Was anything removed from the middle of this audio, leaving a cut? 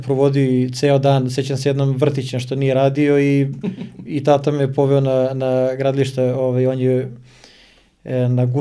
no; 0 cuts

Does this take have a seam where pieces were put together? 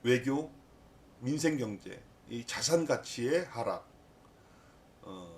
yes; 1 cut; at 1.0 s

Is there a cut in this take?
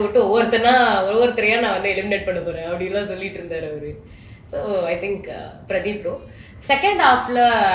no; 0 cuts

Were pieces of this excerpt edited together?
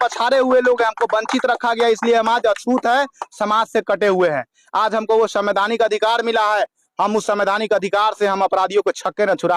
no; 0 cuts

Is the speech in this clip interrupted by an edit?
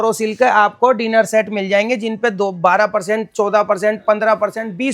no; 0 cuts

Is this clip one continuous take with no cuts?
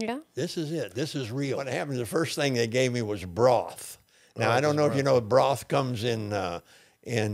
no; 1 cut; at 1.7 s

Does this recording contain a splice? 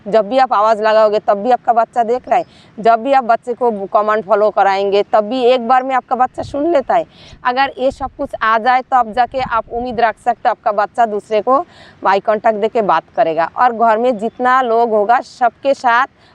no; 0 cuts

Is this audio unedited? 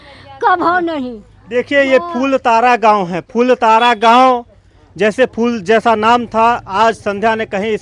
yes; 0 cuts

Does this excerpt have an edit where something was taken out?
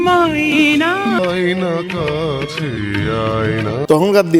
yes; 1 cut; at 1.2 s

